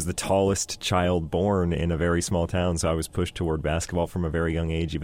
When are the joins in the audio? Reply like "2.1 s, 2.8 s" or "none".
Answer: none